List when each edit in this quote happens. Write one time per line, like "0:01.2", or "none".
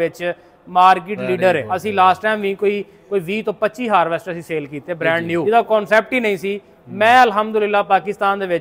0:01.7
0:05.4

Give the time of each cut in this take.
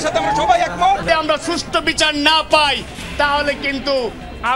0:01.0

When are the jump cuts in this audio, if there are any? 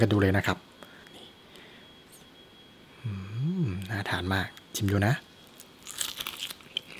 0:01.0

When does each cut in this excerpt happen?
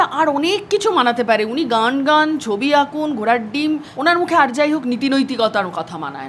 0:03.9

